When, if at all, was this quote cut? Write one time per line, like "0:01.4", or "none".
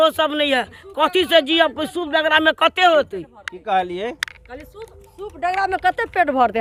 none